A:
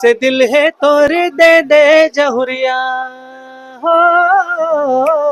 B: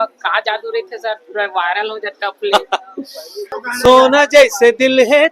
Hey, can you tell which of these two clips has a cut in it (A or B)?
B